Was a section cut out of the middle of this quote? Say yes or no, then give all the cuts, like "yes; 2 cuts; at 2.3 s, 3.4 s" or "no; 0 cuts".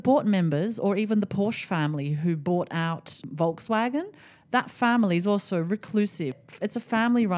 yes; 2 cuts; at 3.2 s, 6.4 s